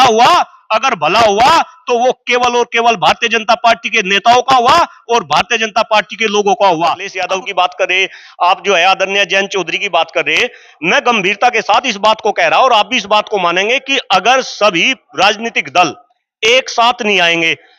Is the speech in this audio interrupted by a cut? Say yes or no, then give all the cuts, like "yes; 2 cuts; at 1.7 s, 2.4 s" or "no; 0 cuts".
yes; 1 cut; at 7.1 s